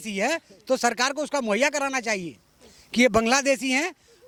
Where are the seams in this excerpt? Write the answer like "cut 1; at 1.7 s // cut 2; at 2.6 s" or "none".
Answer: none